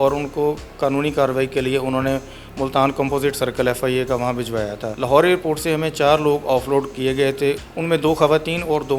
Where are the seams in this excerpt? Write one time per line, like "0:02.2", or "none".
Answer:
0:04.9
0:07.6